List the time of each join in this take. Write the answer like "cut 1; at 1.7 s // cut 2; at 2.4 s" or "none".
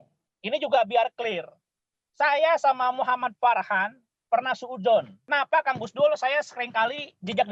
cut 1; at 5.3 s

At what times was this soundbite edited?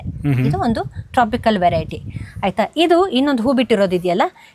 none

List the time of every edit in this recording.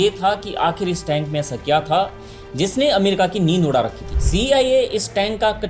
cut 1; at 4.0 s

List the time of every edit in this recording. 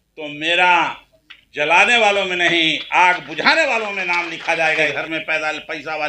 cut 1; at 4.9 s

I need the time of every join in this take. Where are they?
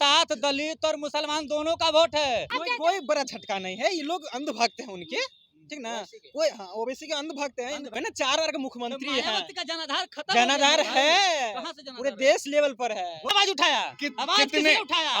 cut 1; at 2.6 s // cut 2; at 7.9 s // cut 3; at 13.3 s

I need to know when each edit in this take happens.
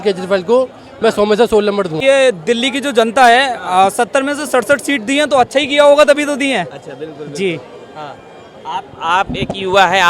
cut 1; at 2.0 s

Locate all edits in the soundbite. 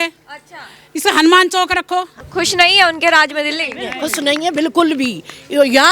cut 1; at 2.2 s

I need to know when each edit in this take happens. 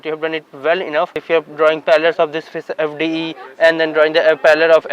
cut 1; at 1.2 s

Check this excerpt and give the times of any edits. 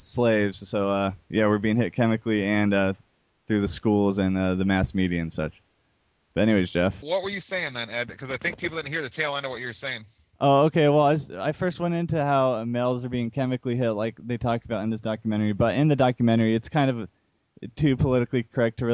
none

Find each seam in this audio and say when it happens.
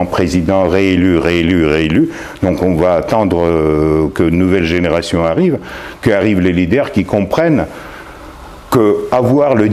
none

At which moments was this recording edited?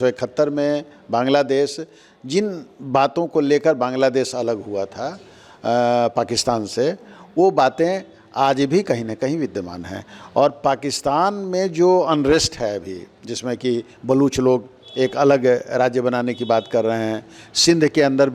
none

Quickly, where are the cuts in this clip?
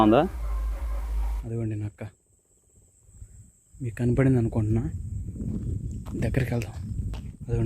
cut 1; at 1.3 s

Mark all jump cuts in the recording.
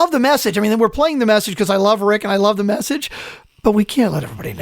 cut 1; at 3.2 s

